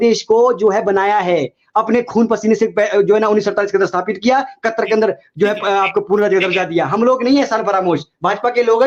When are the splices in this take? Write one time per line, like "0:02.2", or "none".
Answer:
none